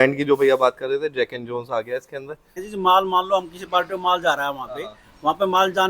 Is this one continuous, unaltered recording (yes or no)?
no